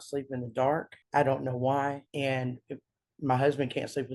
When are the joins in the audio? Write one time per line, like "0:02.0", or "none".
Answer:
0:01.0
0:02.1